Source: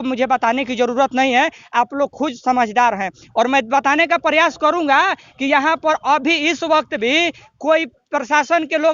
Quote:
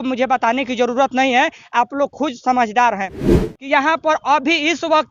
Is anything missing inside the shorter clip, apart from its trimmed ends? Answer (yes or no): yes